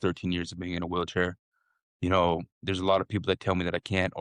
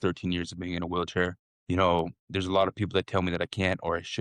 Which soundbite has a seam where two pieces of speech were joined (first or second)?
second